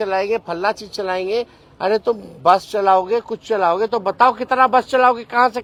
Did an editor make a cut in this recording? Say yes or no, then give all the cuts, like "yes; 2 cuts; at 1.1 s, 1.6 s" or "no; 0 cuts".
no; 0 cuts